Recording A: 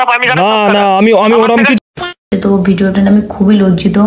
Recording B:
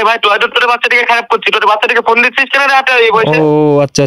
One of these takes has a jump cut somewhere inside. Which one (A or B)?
A